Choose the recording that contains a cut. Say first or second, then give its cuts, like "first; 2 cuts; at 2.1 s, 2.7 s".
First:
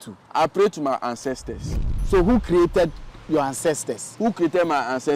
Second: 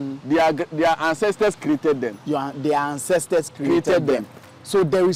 first; 1 cut; at 1.9 s